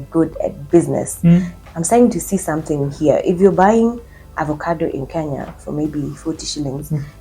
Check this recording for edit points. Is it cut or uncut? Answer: cut